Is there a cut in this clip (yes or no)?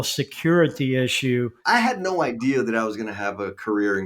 yes